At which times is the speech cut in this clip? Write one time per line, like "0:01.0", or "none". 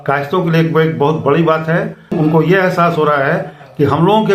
0:02.1

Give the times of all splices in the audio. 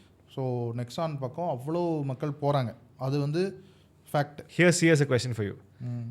0:04.4

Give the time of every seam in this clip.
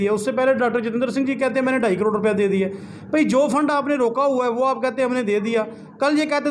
none

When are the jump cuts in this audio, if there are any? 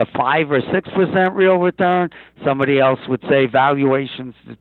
none

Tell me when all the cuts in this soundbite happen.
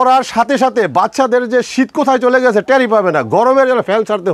none

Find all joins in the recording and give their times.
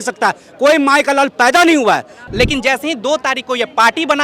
0:02.2

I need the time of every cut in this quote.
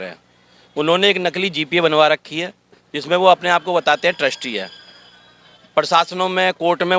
none

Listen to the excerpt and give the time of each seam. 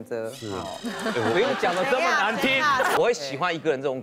0:03.0

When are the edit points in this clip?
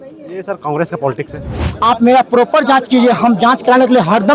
0:01.7

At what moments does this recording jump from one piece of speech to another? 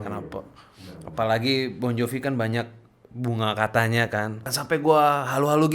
0:04.5

